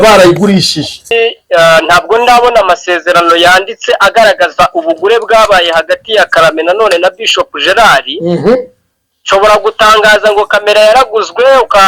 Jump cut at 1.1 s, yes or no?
yes